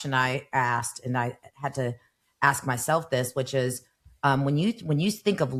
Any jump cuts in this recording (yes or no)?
no